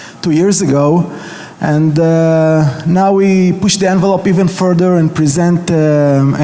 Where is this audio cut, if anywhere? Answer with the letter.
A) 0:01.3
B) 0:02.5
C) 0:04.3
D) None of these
B